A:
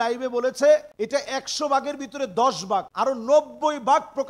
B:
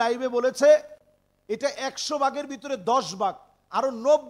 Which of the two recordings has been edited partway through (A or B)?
A